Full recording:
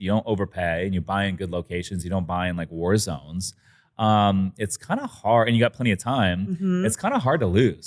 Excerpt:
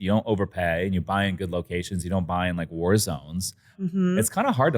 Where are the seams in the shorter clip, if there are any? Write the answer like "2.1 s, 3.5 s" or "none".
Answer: 3.8 s